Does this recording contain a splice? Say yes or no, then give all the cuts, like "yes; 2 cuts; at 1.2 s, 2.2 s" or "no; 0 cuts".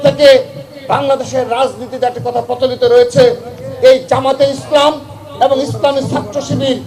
no; 0 cuts